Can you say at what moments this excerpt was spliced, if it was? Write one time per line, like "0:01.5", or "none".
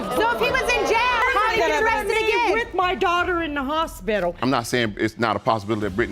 0:01.2
0:02.6
0:04.4